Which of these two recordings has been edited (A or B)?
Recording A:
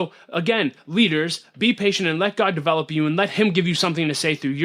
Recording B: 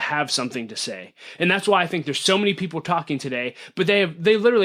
A